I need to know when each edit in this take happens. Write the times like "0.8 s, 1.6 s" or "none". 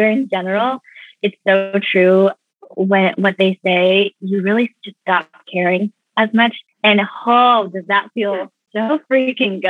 6.7 s, 8.6 s